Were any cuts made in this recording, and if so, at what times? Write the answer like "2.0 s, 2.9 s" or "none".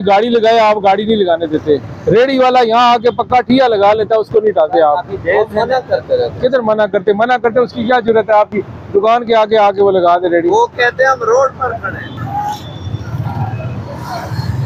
none